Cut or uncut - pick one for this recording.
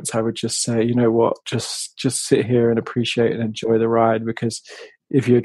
uncut